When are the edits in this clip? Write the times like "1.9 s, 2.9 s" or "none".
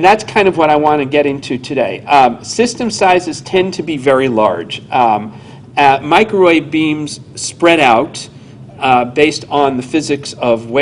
8.0 s